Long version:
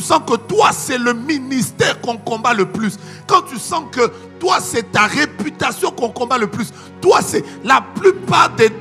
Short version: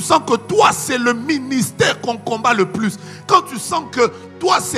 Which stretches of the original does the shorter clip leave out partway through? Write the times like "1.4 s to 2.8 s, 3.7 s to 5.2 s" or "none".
none